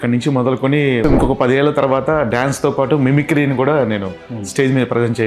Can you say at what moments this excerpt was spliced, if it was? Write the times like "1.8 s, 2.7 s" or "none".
1.0 s